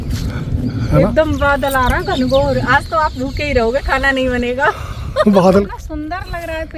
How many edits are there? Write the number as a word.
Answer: one